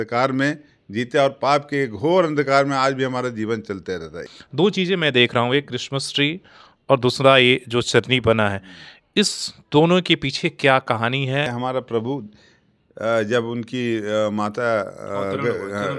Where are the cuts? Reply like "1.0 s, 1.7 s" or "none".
4.2 s, 11.5 s